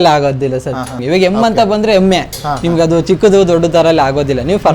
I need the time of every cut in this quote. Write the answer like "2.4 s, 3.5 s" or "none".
1.0 s